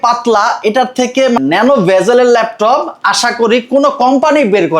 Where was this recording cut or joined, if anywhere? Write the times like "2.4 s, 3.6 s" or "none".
1.4 s